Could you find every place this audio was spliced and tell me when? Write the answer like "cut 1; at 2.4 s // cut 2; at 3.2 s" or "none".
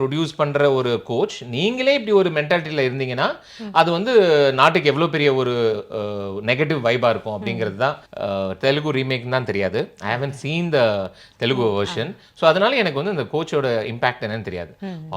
cut 1; at 8.1 s